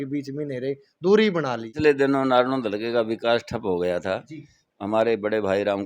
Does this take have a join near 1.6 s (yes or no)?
yes